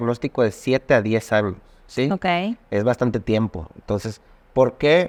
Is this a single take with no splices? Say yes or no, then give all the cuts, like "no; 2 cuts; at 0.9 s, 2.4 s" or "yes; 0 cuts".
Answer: yes; 0 cuts